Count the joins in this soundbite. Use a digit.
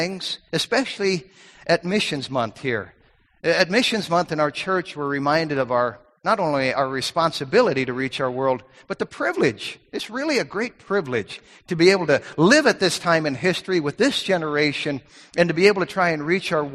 0